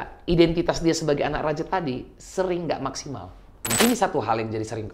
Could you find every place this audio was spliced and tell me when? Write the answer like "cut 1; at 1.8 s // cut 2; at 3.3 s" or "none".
cut 1; at 3.7 s